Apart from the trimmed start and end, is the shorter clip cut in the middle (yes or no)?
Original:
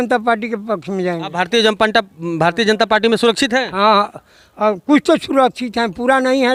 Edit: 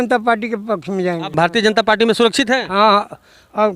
yes